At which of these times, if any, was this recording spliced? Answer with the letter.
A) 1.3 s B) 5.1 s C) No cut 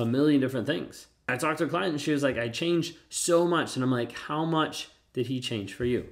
A